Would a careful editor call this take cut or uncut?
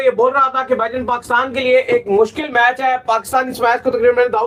uncut